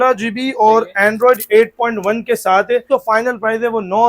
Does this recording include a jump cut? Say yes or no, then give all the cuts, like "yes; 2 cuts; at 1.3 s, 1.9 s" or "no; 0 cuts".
yes; 1 cut; at 2.9 s